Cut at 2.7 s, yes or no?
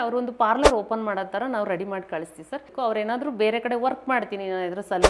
yes